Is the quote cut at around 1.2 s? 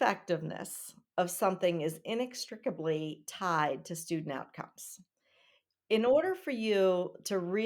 no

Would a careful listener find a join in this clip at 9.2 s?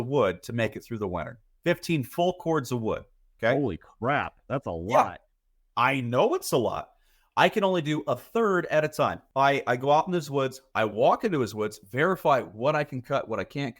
yes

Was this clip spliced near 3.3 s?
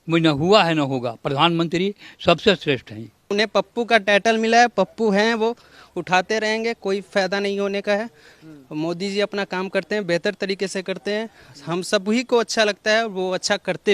yes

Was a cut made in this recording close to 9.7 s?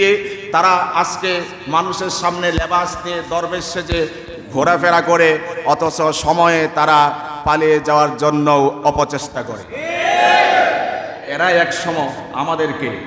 no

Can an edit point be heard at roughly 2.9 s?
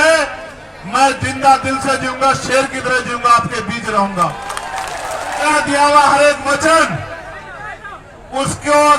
no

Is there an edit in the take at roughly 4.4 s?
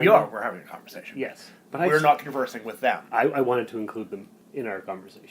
yes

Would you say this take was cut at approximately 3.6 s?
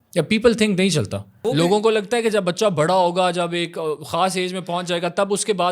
no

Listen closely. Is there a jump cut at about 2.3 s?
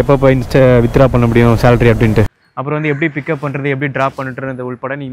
yes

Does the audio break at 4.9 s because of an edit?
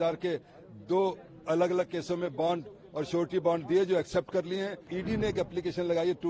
yes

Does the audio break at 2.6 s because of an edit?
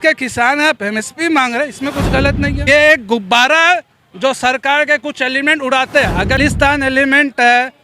yes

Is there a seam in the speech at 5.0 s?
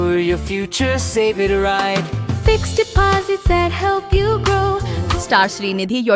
yes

